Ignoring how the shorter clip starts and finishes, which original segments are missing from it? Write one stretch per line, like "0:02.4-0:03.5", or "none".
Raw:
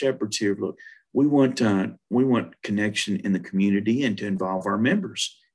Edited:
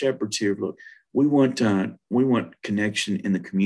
none

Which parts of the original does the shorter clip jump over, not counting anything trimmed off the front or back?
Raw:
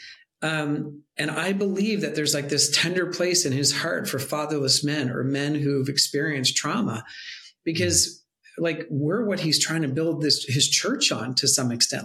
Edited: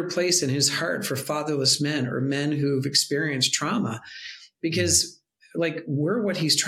none

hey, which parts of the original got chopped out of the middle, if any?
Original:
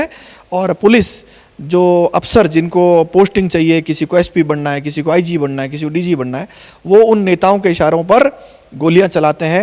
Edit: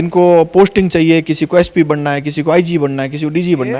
none

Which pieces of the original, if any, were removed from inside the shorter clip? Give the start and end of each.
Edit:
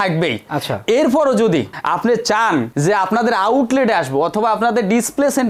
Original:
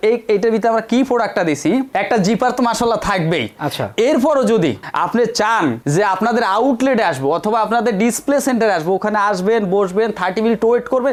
none

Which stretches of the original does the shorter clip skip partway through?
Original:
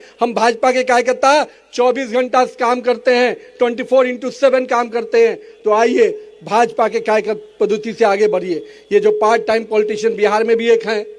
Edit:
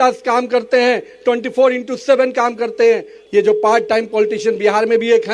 0:05.5-0:08.7

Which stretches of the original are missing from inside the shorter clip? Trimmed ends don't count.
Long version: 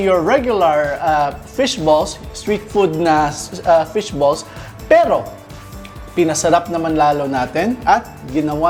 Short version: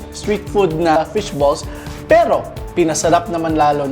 0:03.2-0:03.8
0:05.4-0:06.0

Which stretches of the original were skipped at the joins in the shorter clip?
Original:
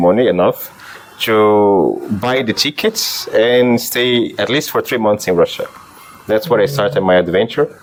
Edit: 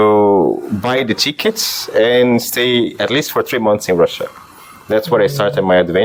none

